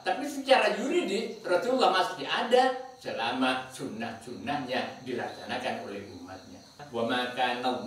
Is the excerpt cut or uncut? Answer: cut